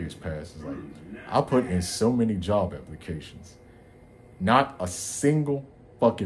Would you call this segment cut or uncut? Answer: uncut